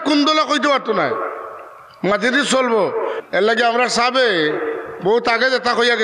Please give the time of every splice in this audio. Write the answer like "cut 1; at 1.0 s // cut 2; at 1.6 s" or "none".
cut 1; at 3.2 s